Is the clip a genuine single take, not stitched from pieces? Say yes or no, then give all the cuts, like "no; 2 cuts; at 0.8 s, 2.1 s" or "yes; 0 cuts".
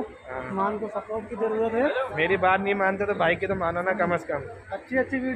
yes; 0 cuts